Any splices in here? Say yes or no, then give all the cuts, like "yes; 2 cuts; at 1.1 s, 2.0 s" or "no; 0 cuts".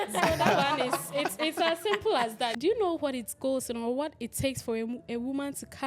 yes; 1 cut; at 2.5 s